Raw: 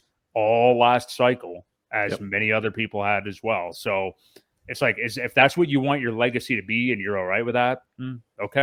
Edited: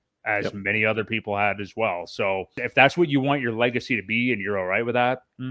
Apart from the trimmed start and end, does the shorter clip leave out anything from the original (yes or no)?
yes